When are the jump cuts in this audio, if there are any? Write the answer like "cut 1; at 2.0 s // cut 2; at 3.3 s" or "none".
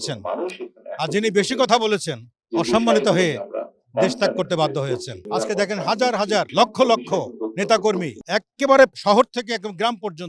cut 1; at 5.1 s // cut 2; at 6.5 s // cut 3; at 8.2 s // cut 4; at 9.0 s